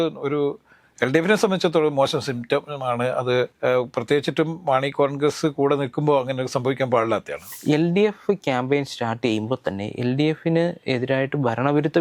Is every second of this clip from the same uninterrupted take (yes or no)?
no